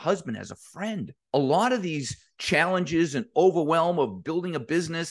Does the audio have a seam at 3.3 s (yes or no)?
no